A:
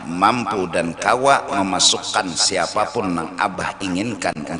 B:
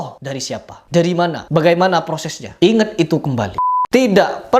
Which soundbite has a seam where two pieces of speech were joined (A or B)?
B